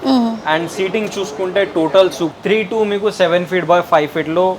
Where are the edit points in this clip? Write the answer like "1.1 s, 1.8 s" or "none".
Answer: 2.3 s

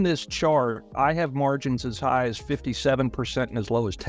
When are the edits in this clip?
none

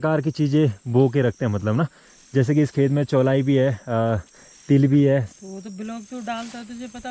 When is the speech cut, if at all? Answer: 5.3 s

